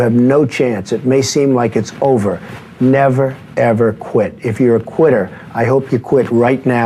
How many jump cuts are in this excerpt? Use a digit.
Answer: 0